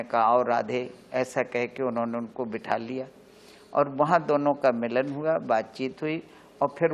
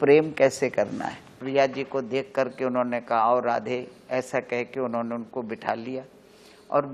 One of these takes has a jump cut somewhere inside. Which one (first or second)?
second